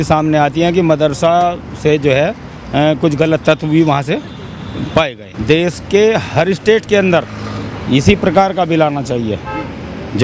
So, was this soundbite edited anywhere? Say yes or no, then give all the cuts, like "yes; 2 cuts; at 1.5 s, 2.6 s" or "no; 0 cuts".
yes; 1 cut; at 5.3 s